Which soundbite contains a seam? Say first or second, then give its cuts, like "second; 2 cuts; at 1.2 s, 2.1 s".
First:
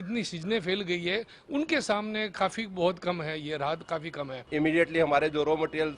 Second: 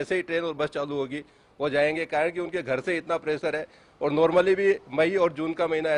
first; 1 cut; at 4.5 s